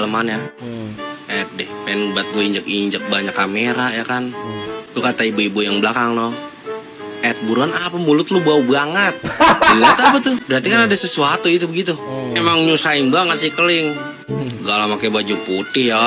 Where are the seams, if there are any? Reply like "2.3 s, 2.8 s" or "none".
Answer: 10.4 s